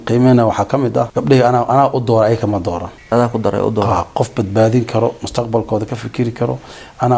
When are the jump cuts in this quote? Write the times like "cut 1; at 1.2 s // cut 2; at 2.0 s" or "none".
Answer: cut 1; at 1.1 s // cut 2; at 2.9 s